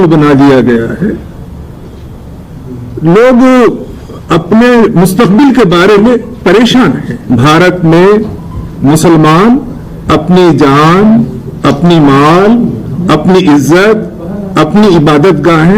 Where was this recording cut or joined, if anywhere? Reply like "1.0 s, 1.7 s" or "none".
7.1 s